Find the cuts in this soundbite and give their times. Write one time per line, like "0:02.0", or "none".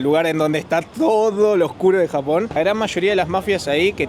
0:02.5